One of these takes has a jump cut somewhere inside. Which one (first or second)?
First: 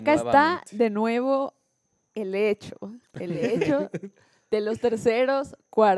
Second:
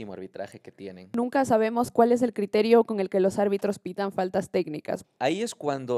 second